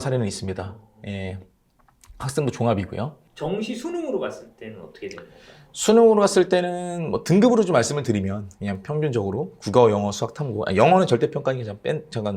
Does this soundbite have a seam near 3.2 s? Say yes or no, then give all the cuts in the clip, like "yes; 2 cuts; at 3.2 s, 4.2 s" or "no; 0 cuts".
yes; 1 cut; at 3.2 s